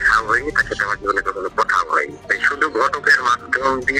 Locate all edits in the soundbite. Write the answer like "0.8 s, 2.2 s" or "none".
none